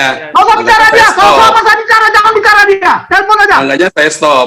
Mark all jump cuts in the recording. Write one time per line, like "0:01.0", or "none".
none